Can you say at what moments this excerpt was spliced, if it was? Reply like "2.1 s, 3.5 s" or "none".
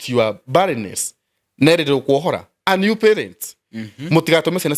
2.5 s